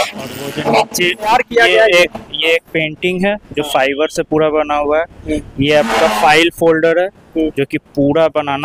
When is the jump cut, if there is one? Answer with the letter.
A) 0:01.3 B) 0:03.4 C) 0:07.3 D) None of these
A